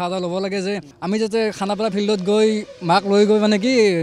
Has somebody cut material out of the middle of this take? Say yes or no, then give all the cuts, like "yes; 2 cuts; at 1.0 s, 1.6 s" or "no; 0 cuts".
yes; 1 cut; at 0.9 s